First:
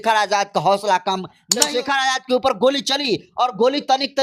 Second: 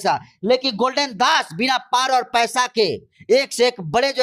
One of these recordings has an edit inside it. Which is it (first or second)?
first